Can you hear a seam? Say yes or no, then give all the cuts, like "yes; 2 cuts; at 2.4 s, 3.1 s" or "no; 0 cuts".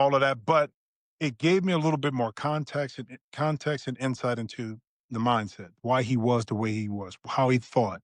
no; 0 cuts